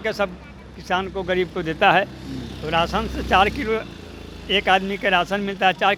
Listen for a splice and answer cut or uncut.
uncut